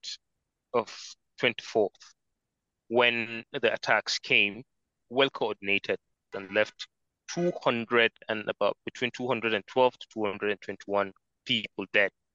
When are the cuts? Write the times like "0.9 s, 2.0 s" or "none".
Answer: 5.0 s, 6.4 s